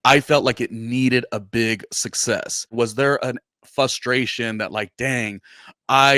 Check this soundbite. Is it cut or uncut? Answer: cut